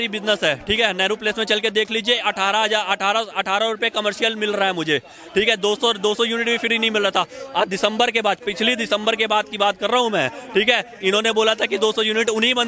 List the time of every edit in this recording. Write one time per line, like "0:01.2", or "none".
none